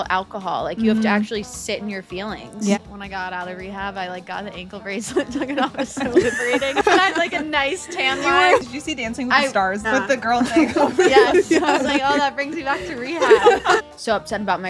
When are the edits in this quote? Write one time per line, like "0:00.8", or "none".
0:02.8
0:06.8
0:08.6
0:09.8
0:13.8